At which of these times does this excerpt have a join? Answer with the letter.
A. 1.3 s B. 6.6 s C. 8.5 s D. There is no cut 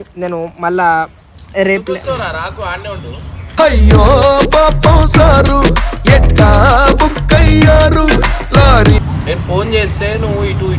D